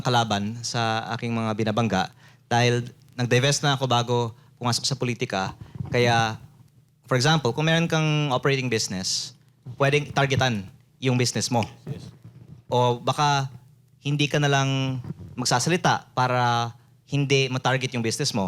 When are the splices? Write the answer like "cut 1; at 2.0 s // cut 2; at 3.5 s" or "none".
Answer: none